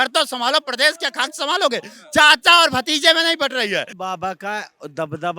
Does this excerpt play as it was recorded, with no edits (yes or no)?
no